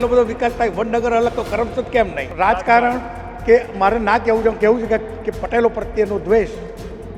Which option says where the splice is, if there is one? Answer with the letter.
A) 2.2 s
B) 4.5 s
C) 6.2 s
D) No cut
A